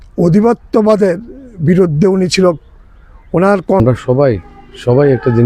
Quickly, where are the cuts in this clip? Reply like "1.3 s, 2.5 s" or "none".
3.8 s

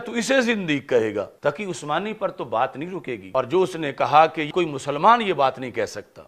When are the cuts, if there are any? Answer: 1.3 s, 3.2 s, 4.5 s

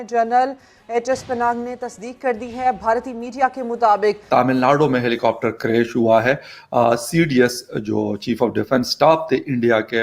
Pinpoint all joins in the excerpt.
4.2 s

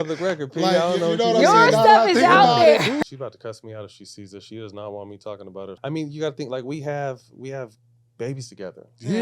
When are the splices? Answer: 3.0 s, 5.7 s

